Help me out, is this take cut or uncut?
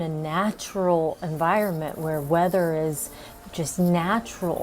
uncut